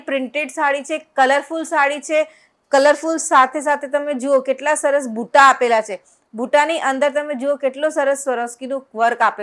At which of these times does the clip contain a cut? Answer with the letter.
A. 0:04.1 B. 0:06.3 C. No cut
C